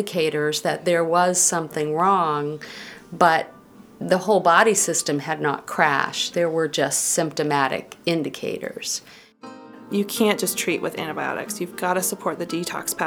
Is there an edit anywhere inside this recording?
yes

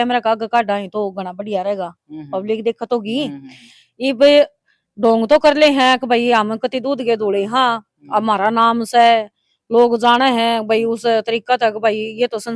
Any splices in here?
no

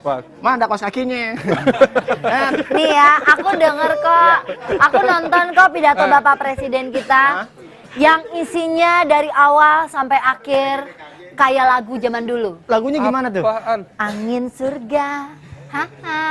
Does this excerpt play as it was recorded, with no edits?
no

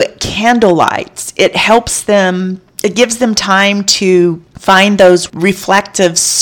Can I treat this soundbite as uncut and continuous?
no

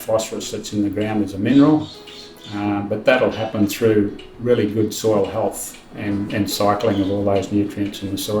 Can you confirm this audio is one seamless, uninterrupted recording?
yes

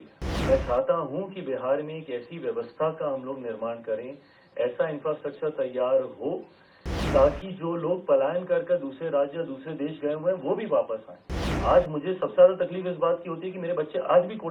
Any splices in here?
no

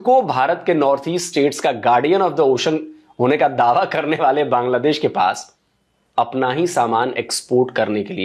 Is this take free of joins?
yes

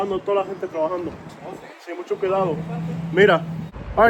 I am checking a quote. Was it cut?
no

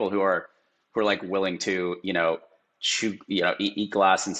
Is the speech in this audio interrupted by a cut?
no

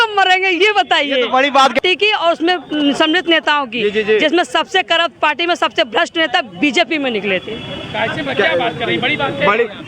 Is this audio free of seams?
no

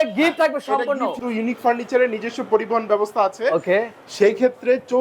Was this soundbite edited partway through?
yes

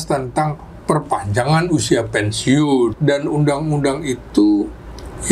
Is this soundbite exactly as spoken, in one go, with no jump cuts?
no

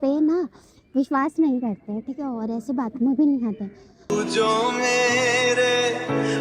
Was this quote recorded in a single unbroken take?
yes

